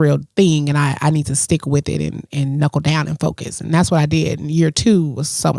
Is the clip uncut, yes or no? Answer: yes